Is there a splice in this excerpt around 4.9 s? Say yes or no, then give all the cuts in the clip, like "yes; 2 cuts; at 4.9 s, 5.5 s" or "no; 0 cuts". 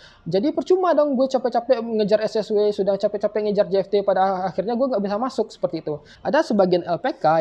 no; 1 cut; at 6.1 s